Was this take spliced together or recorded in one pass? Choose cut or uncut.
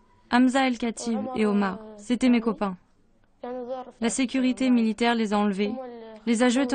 uncut